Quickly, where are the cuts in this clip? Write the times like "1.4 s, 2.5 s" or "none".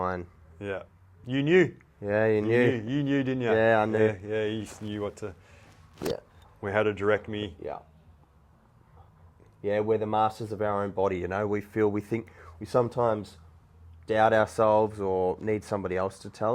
none